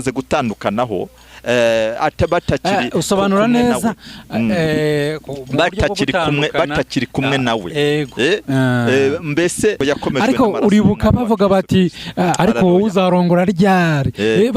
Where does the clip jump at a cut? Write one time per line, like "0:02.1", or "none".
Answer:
0:09.8